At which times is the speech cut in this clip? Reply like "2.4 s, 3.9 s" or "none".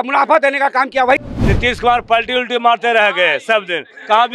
1.2 s